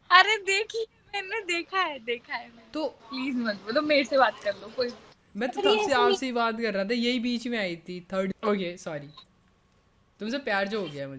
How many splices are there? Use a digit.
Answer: 2